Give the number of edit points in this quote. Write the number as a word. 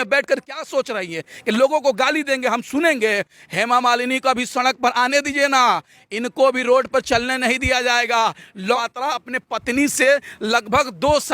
one